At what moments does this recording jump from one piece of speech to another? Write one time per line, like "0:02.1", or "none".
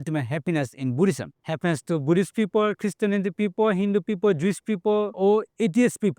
0:01.3
0:05.1